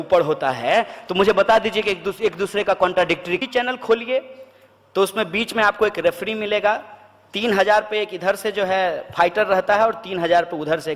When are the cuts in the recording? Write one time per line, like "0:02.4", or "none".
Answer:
0:03.4